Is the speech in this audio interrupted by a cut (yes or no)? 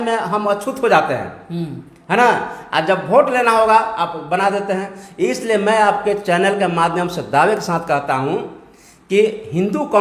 no